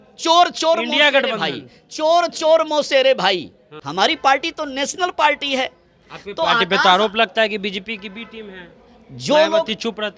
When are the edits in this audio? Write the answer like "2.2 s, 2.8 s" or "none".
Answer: 3.8 s